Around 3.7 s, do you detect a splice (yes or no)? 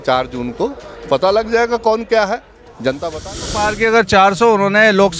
yes